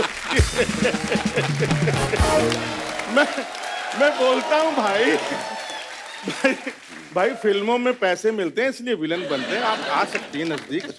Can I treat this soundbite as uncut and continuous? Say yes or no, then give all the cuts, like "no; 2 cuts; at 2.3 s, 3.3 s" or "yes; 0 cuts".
yes; 0 cuts